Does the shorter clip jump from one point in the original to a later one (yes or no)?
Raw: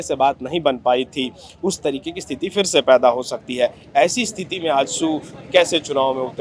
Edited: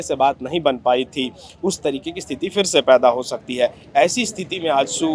no